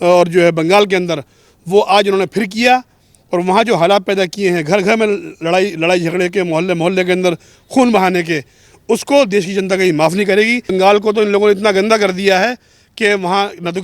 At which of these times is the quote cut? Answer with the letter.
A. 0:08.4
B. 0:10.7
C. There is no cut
B